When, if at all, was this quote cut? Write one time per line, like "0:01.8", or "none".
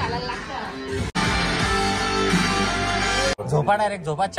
0:01.1
0:03.3